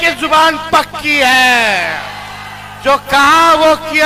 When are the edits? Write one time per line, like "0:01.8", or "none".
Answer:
none